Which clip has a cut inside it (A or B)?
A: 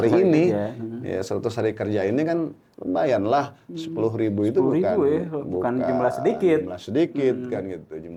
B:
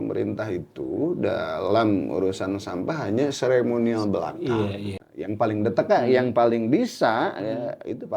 B